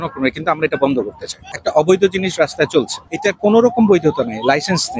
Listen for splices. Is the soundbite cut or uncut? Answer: cut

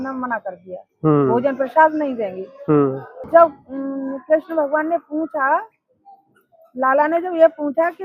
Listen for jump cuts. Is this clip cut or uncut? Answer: cut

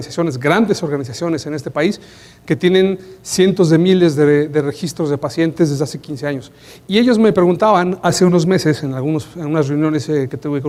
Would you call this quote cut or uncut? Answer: uncut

